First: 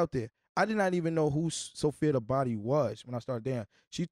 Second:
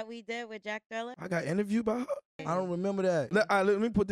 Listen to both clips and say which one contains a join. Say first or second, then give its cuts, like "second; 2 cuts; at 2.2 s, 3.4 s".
second; 3 cuts; at 1.2 s, 2.4 s, 3.3 s